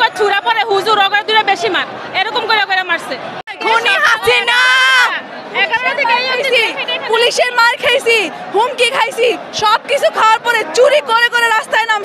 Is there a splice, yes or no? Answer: yes